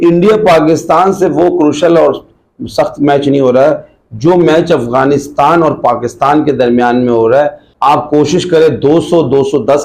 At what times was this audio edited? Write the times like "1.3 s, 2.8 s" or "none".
7.6 s